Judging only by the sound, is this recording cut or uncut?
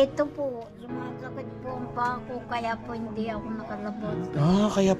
uncut